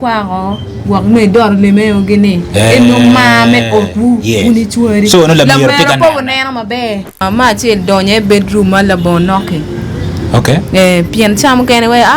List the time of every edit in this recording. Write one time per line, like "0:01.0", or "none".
0:07.2